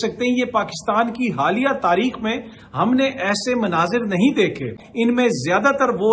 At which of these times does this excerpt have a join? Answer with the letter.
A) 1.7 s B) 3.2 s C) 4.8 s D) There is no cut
C